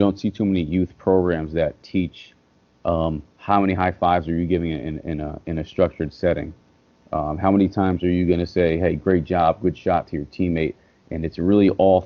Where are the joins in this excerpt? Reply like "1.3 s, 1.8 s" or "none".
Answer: none